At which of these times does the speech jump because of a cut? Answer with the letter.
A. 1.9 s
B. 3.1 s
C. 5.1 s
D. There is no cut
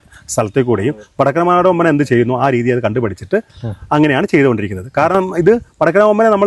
D